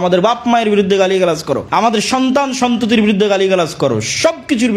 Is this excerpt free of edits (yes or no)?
no